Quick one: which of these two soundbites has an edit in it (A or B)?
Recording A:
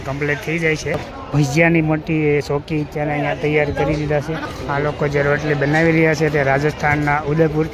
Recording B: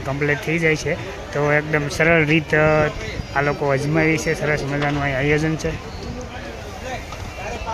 A